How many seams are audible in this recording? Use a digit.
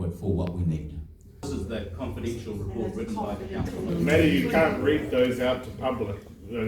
2